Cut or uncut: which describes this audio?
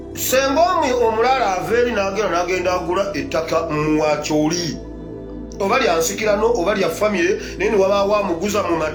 uncut